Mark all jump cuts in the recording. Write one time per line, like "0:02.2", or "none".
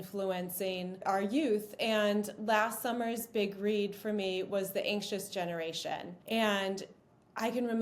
0:01.0
0:06.1

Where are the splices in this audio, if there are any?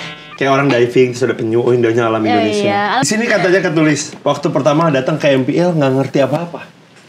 0:03.1

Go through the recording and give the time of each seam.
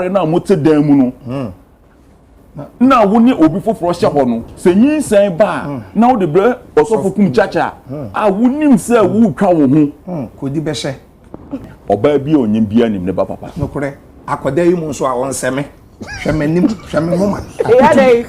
0:11.7

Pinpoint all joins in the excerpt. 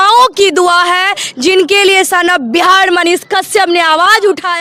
none

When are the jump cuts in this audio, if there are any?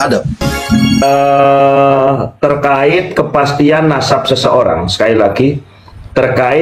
0:01.0

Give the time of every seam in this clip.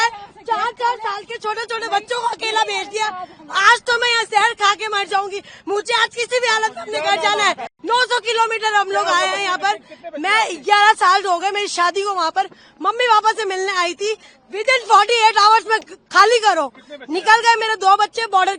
0:07.7

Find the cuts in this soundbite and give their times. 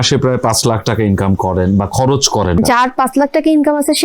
0:02.6

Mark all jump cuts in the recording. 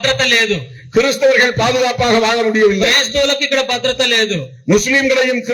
none

